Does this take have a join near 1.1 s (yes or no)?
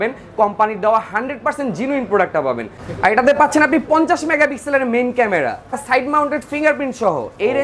no